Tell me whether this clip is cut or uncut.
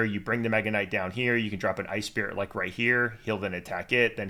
uncut